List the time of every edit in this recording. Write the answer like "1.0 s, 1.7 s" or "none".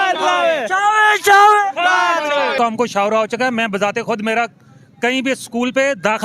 2.5 s